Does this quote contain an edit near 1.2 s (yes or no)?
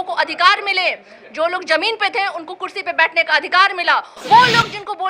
no